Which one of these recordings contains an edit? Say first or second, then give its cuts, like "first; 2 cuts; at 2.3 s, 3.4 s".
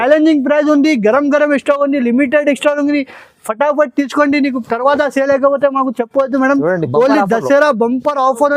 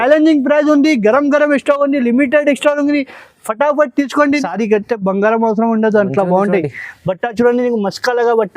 second; 1 cut; at 4.4 s